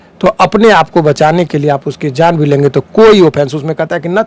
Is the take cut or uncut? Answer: uncut